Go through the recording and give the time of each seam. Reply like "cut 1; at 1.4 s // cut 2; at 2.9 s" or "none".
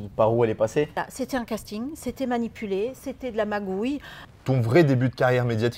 cut 1; at 1.0 s // cut 2; at 4.2 s